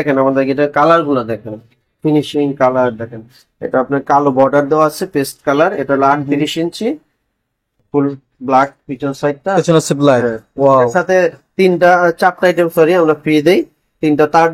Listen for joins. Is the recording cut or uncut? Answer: uncut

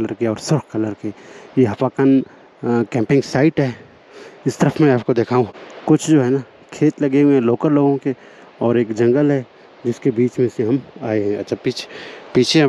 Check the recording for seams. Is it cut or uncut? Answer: cut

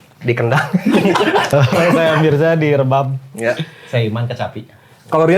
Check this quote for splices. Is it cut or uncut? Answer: cut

